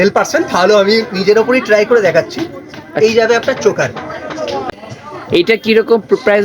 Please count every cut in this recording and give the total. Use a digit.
1